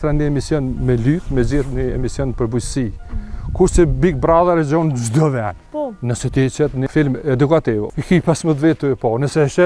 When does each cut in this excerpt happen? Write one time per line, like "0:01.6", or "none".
0:05.6
0:06.9
0:07.8